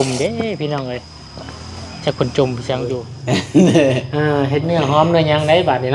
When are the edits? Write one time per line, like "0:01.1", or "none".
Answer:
0:03.1